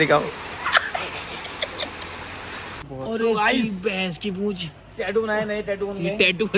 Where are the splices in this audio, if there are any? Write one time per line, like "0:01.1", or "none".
0:02.9